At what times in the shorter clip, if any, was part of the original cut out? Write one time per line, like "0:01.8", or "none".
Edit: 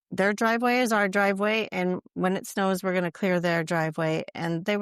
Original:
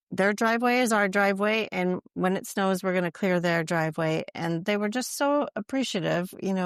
none